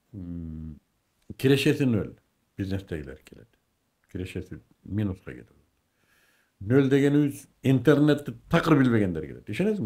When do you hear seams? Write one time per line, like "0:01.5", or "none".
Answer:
none